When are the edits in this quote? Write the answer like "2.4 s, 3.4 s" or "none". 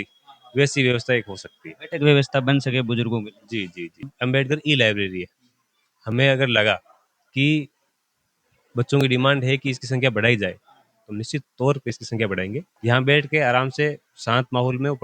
4.1 s, 12.7 s

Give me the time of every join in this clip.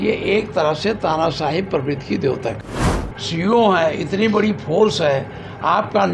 2.8 s

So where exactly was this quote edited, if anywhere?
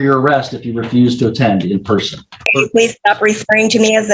2.4 s

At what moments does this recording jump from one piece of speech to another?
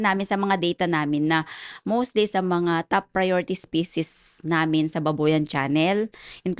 none

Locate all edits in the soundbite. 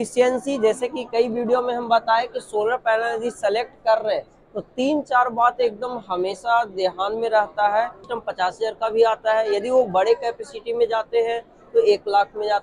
8.1 s

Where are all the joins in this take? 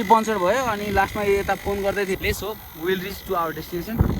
2.2 s

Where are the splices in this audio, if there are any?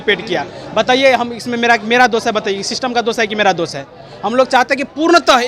none

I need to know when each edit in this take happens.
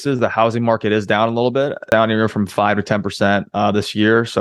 1.8 s

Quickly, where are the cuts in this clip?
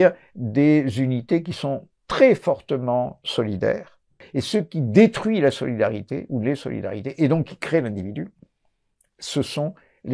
4.2 s

